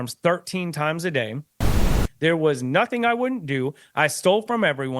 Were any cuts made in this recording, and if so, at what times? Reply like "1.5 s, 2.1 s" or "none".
1.8 s